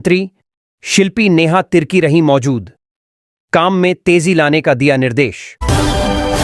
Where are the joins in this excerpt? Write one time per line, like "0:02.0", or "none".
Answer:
0:05.5